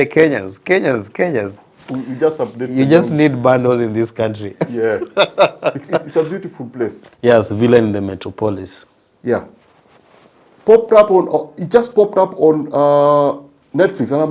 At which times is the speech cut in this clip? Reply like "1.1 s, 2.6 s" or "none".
7.0 s